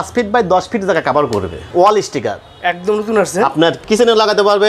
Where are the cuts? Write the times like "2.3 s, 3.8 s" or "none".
1.7 s, 3.8 s

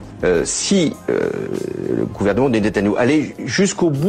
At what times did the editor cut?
0.9 s

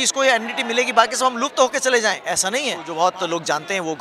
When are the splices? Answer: 2.8 s

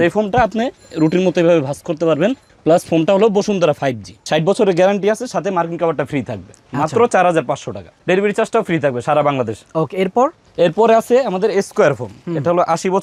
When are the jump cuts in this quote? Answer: none

